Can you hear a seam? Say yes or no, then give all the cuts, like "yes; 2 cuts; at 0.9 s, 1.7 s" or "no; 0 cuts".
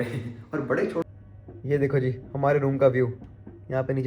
yes; 1 cut; at 1.0 s